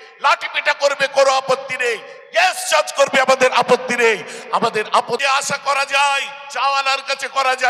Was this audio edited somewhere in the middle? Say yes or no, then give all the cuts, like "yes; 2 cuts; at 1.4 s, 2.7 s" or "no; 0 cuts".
yes; 1 cut; at 5.2 s